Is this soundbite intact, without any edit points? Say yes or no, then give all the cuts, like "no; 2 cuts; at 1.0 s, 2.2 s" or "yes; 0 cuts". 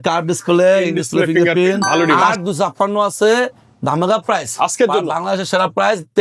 no; 1 cut; at 2.3 s